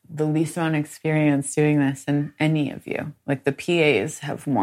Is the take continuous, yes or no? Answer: yes